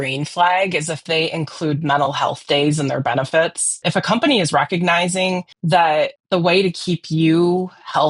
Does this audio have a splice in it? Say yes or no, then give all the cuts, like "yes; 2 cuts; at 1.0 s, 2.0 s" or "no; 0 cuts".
yes; 2 cuts; at 1.0 s, 3.8 s